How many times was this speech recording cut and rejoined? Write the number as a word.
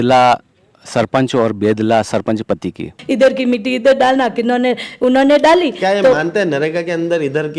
one